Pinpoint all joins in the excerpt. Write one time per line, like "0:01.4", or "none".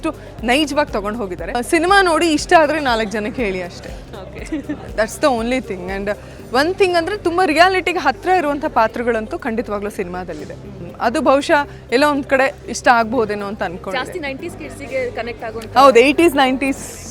0:01.6
0:10.8